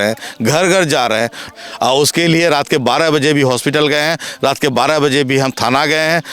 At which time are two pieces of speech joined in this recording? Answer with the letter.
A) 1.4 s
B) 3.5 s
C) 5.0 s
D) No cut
A